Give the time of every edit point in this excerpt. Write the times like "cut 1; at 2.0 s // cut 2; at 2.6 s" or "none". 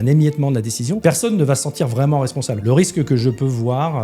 cut 1; at 1.0 s // cut 2; at 2.6 s